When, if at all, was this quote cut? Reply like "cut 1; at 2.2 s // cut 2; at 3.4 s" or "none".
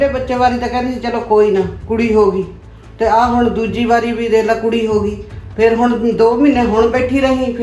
none